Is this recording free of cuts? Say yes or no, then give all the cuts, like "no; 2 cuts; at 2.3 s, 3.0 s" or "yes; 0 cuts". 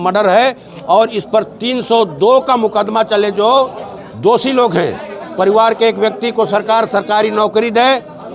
yes; 0 cuts